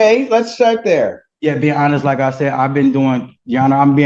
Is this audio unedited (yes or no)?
yes